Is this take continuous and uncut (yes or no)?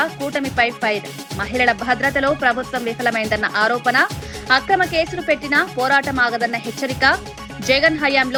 yes